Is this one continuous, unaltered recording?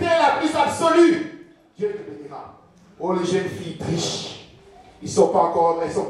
no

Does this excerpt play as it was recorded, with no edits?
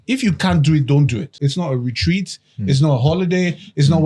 no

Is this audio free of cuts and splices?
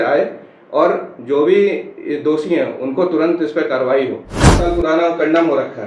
no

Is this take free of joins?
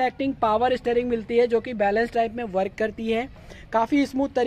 yes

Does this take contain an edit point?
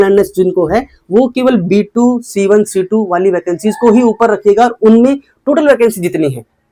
no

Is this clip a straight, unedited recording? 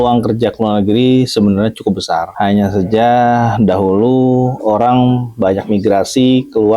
yes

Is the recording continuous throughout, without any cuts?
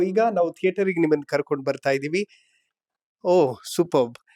yes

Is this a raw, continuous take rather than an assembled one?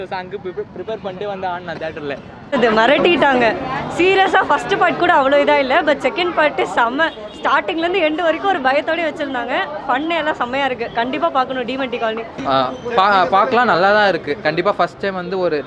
no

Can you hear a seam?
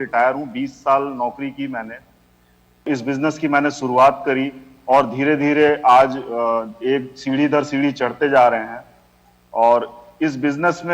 yes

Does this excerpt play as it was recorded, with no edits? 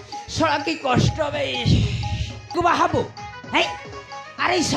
no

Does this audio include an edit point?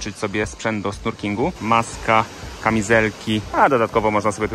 yes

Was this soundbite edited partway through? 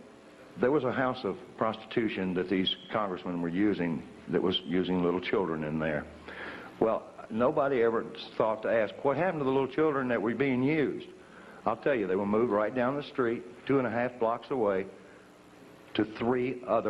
yes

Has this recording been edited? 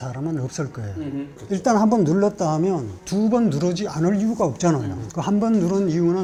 no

